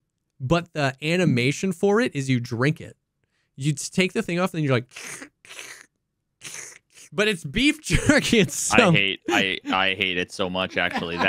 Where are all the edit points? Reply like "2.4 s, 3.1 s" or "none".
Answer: none